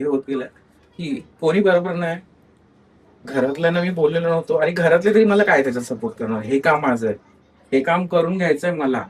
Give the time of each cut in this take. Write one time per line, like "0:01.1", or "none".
none